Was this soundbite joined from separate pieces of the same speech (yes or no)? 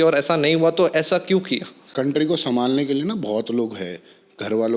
yes